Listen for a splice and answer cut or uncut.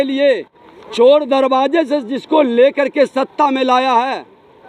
uncut